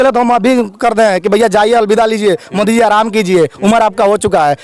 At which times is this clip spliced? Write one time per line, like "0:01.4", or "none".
none

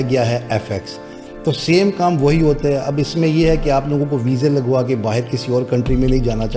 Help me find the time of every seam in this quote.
none

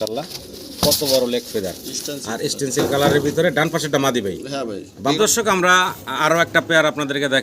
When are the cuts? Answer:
0:05.2

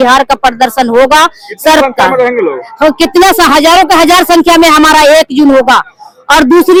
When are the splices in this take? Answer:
none

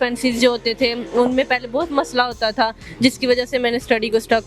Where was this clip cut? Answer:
none

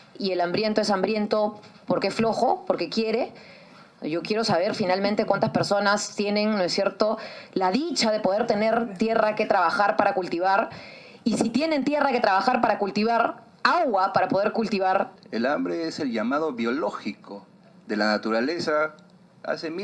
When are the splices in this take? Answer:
0:15.2

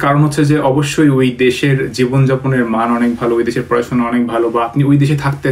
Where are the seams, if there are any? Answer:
none

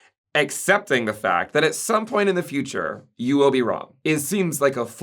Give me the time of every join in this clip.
0:03.9

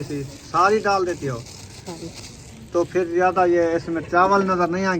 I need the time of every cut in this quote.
0:02.0

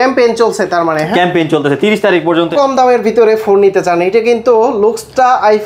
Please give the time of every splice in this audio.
0:02.5

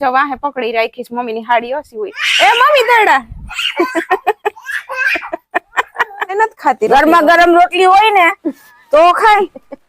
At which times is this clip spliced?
0:06.3

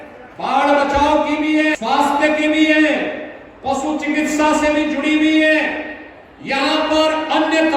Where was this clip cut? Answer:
none

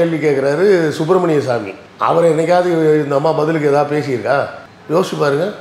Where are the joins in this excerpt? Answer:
none

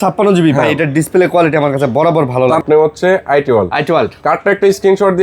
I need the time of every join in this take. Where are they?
0:02.6

